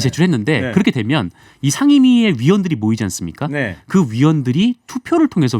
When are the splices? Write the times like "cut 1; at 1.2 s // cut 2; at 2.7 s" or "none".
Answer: none